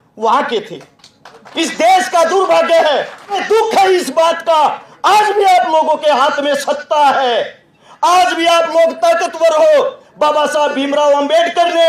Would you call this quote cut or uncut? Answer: cut